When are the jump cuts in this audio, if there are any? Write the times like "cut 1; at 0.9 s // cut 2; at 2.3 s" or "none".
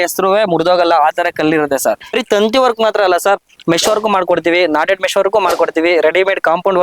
cut 1; at 2.2 s

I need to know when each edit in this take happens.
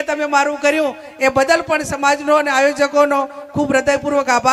none

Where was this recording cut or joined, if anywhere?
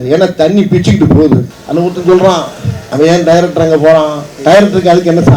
cut 1; at 1.6 s // cut 2; at 4.2 s

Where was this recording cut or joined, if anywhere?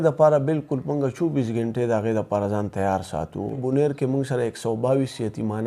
cut 1; at 3.6 s

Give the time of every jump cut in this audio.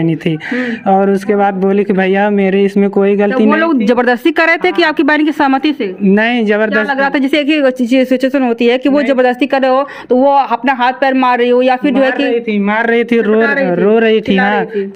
none

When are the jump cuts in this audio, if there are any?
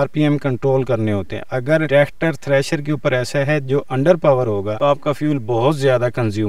cut 1; at 1.9 s // cut 2; at 4.7 s

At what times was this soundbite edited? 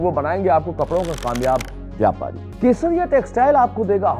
cut 1; at 2.4 s

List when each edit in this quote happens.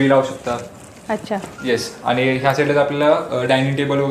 none

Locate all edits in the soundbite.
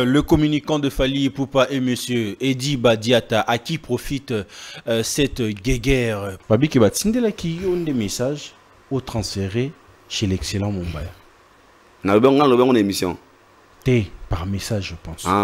cut 1; at 6.3 s

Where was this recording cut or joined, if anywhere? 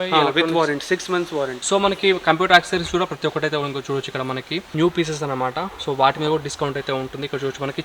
cut 1; at 1.6 s // cut 2; at 4.7 s

